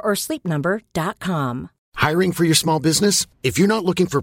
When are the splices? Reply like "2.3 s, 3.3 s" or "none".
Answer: 1.8 s